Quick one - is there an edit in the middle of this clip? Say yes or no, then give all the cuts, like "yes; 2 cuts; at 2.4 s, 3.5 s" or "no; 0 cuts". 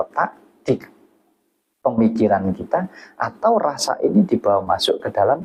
no; 0 cuts